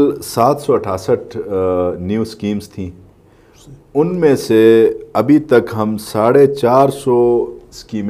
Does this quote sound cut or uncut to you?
uncut